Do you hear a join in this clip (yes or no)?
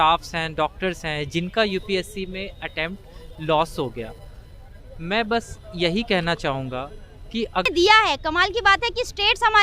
yes